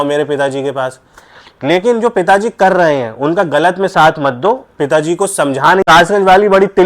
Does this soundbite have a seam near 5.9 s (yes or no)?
yes